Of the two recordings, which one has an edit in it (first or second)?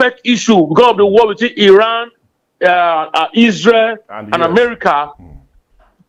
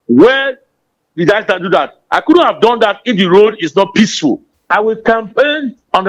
second